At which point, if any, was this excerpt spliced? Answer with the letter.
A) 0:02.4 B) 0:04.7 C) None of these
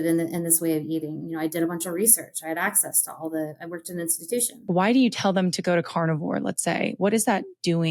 B